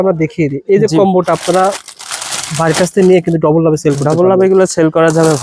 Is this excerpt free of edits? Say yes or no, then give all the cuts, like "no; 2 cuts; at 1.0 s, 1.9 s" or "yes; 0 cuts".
yes; 0 cuts